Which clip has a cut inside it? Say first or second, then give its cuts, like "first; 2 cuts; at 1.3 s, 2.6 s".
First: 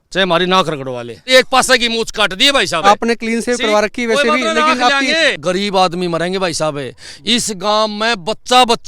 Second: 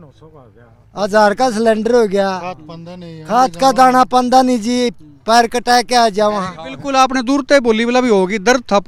first; 3 cuts; at 1.3 s, 2.8 s, 5.4 s